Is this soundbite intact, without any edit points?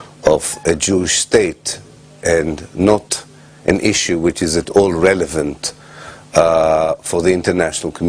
no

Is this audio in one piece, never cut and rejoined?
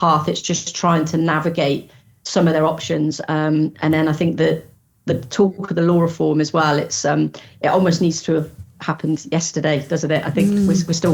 yes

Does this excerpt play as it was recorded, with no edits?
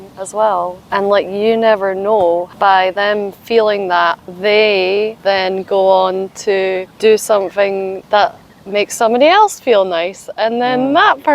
no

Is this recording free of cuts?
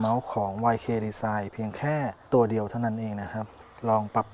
yes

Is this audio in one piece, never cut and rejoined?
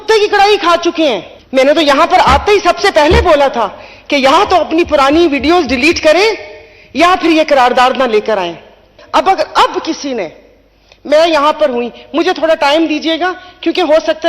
no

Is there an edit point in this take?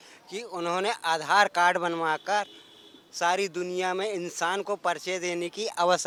no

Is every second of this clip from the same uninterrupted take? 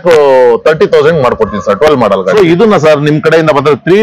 no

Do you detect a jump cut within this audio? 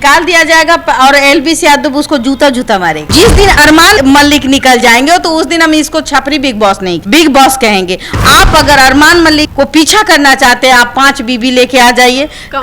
yes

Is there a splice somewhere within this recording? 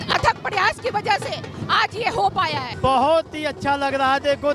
yes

